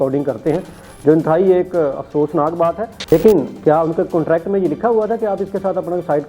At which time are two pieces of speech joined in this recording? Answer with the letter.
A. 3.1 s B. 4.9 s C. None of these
A